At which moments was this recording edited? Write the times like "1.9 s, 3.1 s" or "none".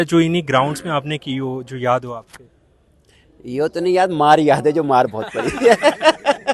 none